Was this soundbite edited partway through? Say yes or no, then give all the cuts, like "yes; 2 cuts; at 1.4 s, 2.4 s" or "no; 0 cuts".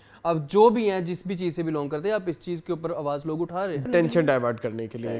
yes; 1 cut; at 3.9 s